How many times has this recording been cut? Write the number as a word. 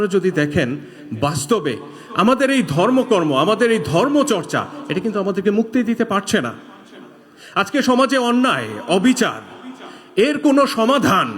zero